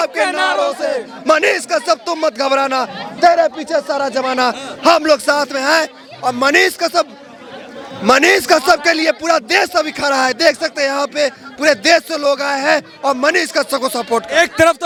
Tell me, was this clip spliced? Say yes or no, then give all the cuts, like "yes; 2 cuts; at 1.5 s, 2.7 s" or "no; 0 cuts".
no; 0 cuts